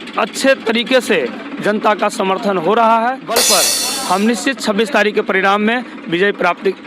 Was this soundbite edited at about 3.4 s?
yes; 1 cut; at 3.4 s

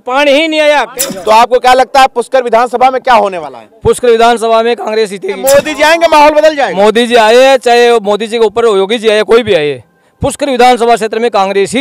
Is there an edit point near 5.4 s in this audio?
yes; 2 cuts; at 0.9 s, 5.4 s

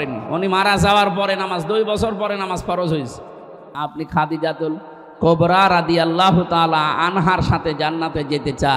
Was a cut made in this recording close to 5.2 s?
no; 1 cut; at 3.8 s

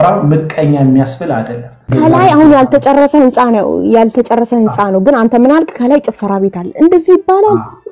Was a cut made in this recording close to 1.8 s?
yes; 1 cut; at 1.8 s

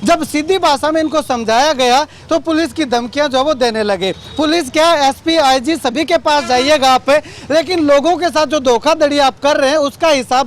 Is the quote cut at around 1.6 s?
no; 0 cuts

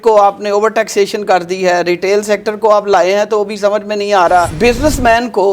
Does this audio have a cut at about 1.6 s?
no; 1 cut; at 4.5 s

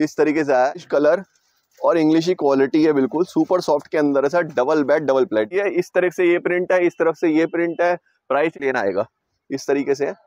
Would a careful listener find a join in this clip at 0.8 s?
yes; 3 cuts; at 0.8 s, 5.5 s, 8.6 s

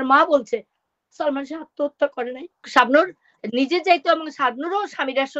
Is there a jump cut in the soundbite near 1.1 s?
no; 1 cut; at 2.7 s

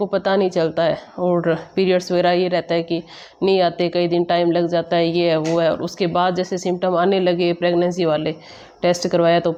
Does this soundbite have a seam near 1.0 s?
no; 0 cuts

